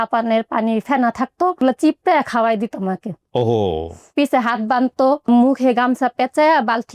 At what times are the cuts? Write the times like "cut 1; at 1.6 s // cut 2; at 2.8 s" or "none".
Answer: cut 1; at 1.6 s // cut 2; at 4.1 s // cut 3; at 5.3 s

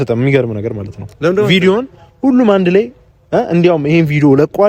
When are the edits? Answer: none

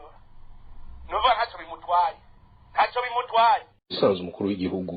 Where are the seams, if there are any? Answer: cut 1; at 4.0 s

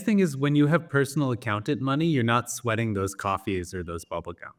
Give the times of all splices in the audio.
none

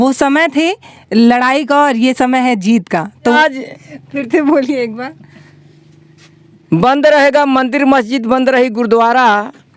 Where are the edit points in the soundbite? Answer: cut 1; at 3.2 s

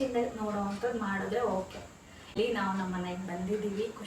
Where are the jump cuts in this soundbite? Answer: cut 1; at 2.4 s

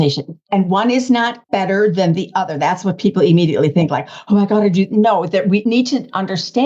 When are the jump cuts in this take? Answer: cut 1; at 1.4 s // cut 2; at 5.6 s

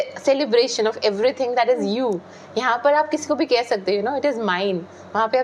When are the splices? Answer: none

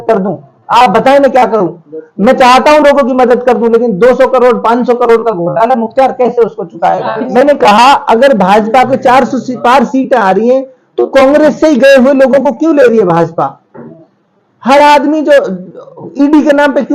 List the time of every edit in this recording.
cut 1; at 7.3 s

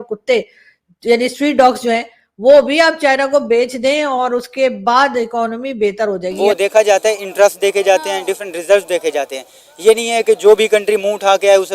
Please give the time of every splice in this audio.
cut 1; at 6.3 s

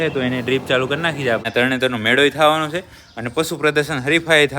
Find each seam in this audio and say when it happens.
cut 1; at 1.5 s

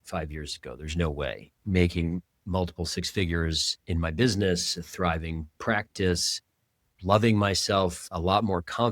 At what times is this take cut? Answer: cut 1; at 1.5 s // cut 2; at 8.0 s

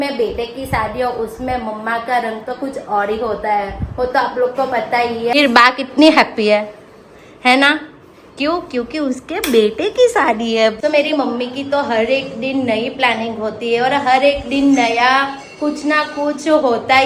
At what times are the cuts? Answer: none

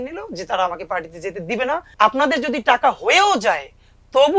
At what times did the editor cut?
cut 1; at 1.9 s

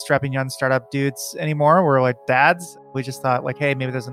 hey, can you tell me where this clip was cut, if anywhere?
cut 1; at 2.8 s

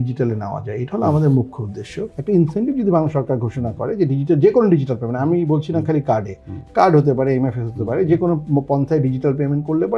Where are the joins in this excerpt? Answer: cut 1; at 2.1 s

